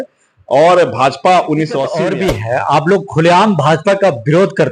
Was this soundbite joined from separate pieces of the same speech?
yes; 1 cut; at 1.9 s

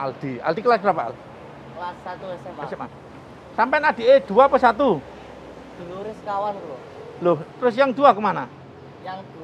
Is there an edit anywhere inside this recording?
no; 0 cuts

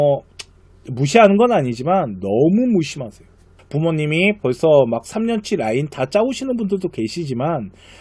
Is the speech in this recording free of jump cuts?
no; 1 cut; at 3.6 s

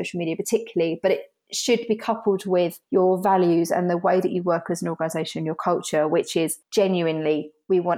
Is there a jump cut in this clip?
yes; 1 cut; at 2.8 s

